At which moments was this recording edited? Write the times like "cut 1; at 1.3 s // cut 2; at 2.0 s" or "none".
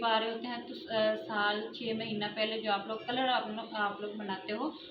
none